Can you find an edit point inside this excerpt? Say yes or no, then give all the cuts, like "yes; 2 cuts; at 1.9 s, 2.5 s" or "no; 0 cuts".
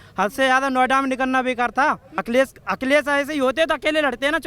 yes; 1 cut; at 2.1 s